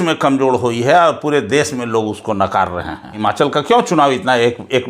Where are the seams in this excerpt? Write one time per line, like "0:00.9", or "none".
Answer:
0:03.1